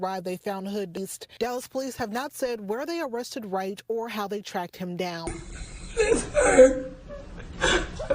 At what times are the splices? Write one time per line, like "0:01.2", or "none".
0:05.3